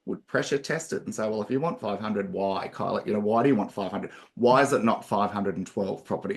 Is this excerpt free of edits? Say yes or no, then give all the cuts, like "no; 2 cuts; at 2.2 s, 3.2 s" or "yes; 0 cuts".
yes; 0 cuts